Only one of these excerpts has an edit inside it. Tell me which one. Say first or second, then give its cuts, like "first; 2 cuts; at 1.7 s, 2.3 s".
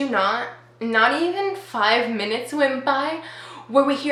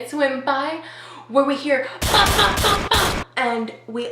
second; 1 cut; at 3.2 s